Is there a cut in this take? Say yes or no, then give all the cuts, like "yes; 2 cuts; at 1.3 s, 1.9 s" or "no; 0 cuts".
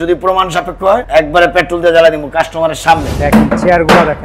yes; 2 cuts; at 1.0 s, 3.1 s